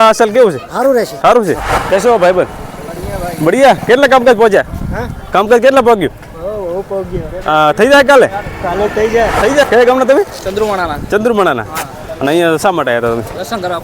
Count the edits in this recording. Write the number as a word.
two